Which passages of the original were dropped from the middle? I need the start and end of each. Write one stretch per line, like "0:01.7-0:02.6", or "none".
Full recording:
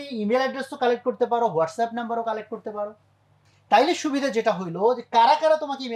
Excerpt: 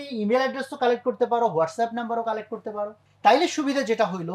0:03.0-0:03.5